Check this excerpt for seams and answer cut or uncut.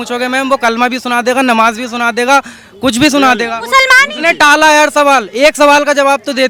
uncut